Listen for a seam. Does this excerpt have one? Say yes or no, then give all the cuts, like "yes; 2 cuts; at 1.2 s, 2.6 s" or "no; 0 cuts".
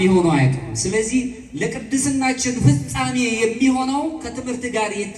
no; 0 cuts